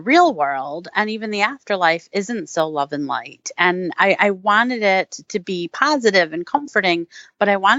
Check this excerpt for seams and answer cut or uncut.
uncut